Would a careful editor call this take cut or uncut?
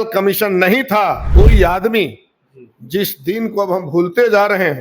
cut